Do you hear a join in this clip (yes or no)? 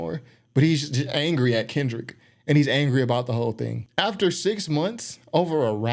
yes